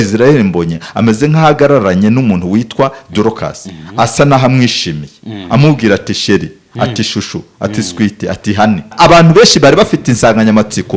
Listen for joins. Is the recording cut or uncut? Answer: cut